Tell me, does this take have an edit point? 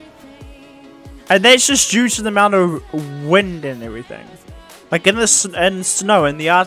no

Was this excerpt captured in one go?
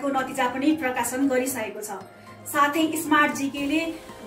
yes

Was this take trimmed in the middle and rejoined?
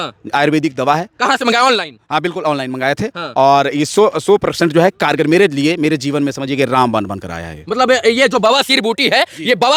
no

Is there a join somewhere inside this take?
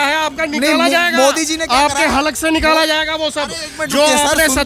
no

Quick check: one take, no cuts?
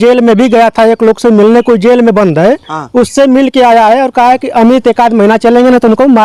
yes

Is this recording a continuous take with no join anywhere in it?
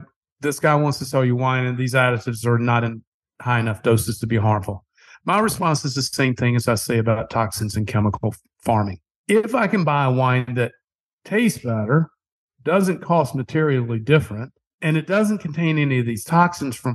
no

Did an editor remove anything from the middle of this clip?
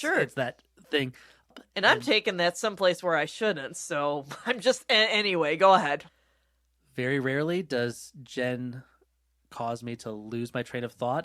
yes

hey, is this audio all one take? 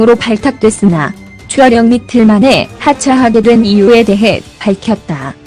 no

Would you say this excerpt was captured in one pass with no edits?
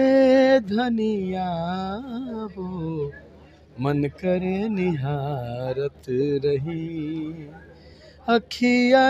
yes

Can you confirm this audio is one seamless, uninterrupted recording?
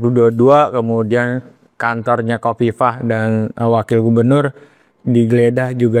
yes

